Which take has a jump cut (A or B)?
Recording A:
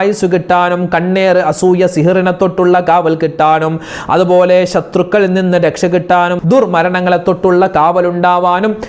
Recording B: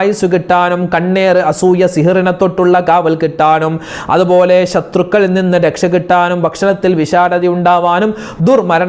A